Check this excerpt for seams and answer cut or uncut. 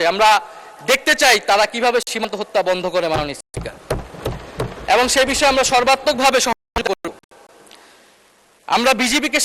uncut